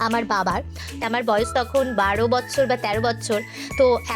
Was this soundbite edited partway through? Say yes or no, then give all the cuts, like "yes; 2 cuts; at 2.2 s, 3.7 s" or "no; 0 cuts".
yes; 1 cut; at 1.0 s